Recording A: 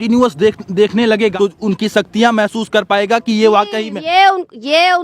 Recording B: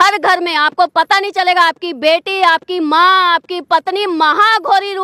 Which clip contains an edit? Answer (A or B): A